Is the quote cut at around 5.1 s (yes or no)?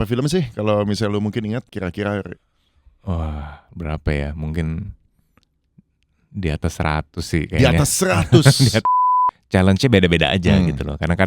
no